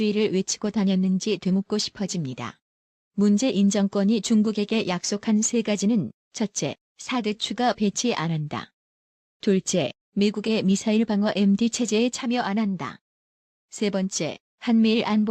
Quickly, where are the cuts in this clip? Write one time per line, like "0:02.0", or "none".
none

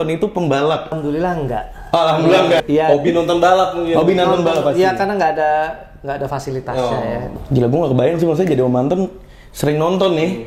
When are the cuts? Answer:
0:00.9
0:02.6
0:07.3

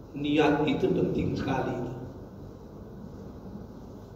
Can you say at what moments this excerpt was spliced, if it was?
none

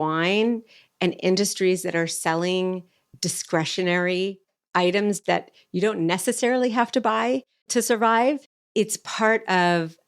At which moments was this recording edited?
0:05.2

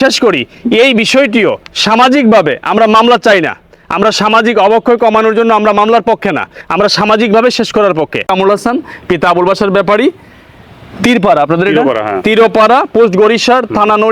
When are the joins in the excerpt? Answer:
0:08.3

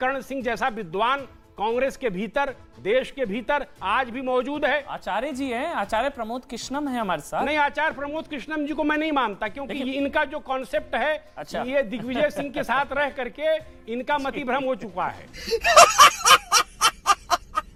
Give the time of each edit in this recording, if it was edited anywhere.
none

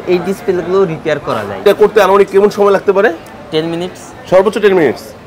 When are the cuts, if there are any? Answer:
0:01.6

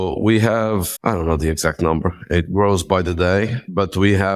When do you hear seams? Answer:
0:00.9

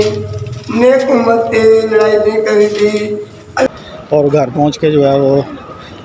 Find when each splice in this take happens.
0:03.7

